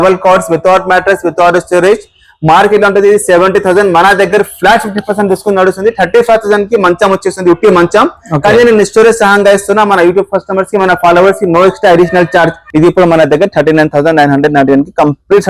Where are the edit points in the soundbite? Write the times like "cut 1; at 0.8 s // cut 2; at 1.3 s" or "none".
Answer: cut 1; at 12.6 s